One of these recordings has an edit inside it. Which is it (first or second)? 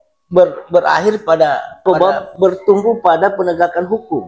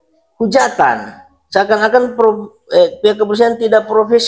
first